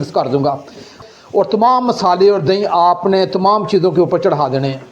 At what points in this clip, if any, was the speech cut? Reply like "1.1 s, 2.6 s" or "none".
1.0 s